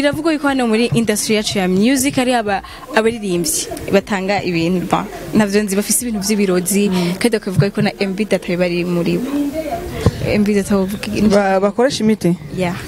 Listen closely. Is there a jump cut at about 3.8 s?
no; 0 cuts

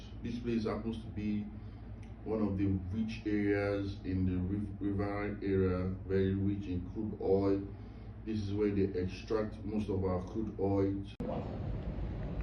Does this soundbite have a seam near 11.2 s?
yes; 1 cut; at 11.2 s

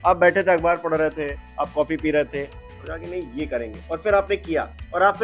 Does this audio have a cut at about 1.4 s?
no; 0 cuts

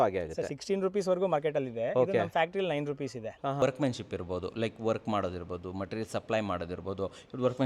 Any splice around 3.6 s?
yes; 1 cut; at 3.6 s

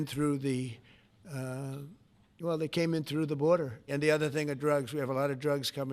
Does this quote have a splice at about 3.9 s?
yes; 1 cut; at 3.9 s

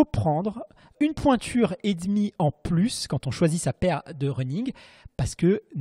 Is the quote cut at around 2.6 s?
no; 1 cut; at 0.9 s

